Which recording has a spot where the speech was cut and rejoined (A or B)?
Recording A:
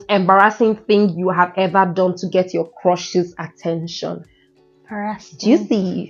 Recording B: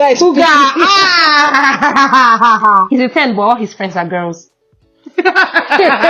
B